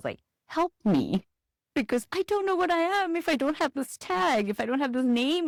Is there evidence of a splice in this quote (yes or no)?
no